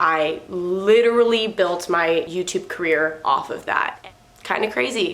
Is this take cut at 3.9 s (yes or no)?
yes